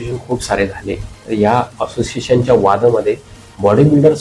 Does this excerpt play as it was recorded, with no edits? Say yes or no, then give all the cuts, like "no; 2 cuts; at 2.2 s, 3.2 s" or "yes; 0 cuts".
yes; 0 cuts